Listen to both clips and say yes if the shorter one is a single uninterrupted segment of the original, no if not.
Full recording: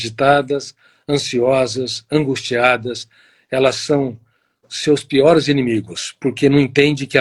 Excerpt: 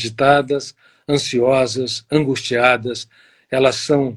yes